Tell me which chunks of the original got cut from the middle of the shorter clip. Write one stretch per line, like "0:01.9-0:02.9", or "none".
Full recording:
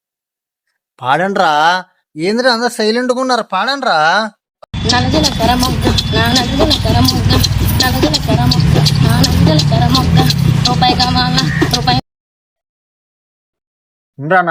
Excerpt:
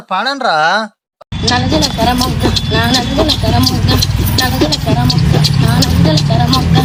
none